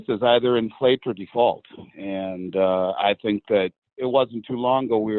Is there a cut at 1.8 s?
no; 1 cut; at 3.9 s

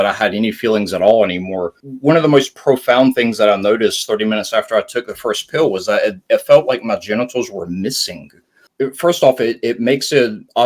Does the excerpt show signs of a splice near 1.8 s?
yes; 2 cuts; at 1.8 s, 8.6 s

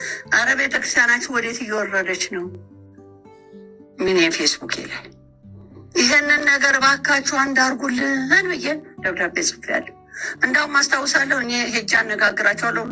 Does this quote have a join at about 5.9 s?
no; 2 cuts; at 2.5 s, 3.9 s

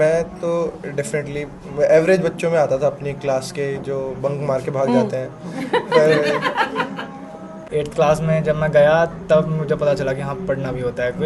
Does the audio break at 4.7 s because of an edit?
no; 1 cut; at 7.5 s

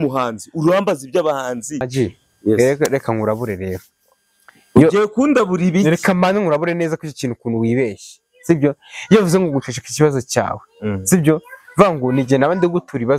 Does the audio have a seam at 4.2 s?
no; 1 cut; at 1.9 s

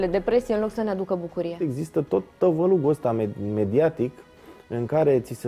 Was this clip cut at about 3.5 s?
no; 1 cut; at 1.7 s

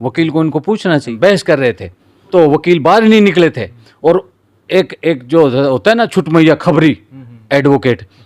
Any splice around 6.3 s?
no; 2 cuts; at 1.1 s, 2.3 s

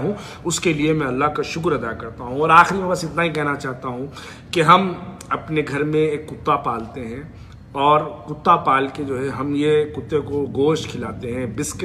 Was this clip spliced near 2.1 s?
no; 0 cuts

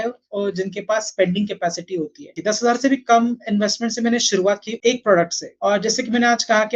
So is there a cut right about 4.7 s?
yes; 3 cuts; at 2.4 s, 4.7 s, 5.4 s

